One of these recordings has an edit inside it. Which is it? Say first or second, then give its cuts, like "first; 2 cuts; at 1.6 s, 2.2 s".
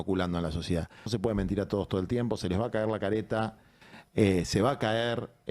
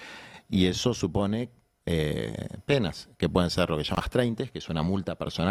first; 1 cut; at 1.1 s